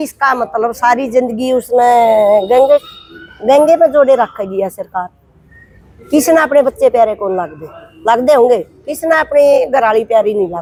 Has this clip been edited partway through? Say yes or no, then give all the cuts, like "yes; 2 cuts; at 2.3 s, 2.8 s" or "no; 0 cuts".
no; 0 cuts